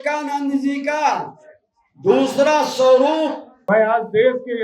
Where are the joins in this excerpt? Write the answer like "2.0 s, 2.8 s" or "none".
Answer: 3.5 s